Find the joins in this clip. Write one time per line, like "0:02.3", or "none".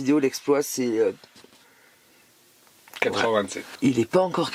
0:03.6